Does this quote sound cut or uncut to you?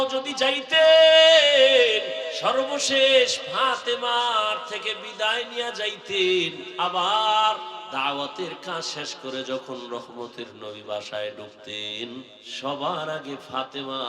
cut